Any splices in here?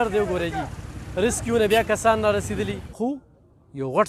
yes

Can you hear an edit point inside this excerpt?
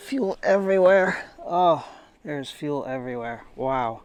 no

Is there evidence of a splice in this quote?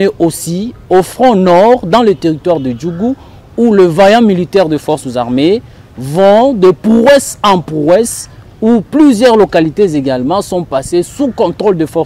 no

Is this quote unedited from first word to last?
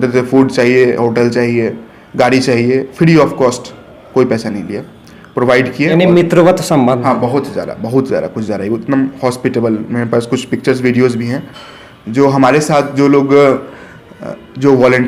yes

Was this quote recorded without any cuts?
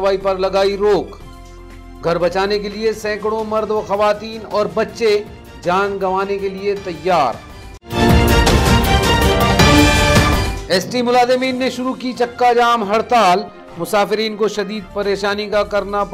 yes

